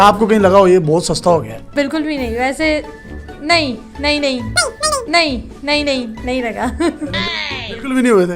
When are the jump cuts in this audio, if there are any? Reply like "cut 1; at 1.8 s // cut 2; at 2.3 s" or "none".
none